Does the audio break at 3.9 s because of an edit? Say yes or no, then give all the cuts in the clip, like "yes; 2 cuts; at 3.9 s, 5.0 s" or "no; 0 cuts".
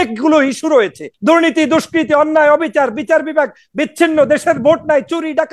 no; 1 cut; at 1.0 s